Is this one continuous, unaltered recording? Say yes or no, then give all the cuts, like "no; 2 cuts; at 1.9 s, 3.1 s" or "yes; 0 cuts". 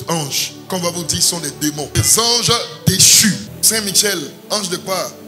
no; 2 cuts; at 1.9 s, 3.5 s